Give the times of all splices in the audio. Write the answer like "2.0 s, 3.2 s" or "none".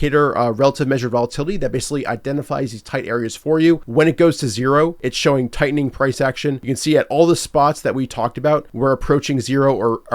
3.8 s, 5.0 s, 6.7 s, 8.7 s